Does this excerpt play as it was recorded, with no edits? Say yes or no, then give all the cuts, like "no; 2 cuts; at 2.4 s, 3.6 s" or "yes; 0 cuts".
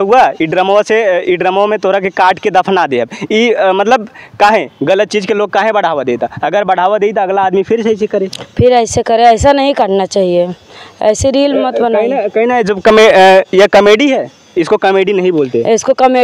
yes; 0 cuts